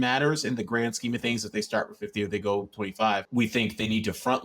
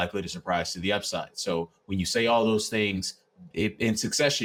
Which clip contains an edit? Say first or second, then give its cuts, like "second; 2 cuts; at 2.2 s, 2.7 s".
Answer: first; 1 cut; at 3.3 s